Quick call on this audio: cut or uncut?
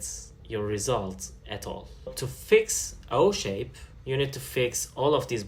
cut